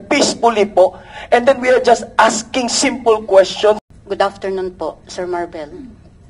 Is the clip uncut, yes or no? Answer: no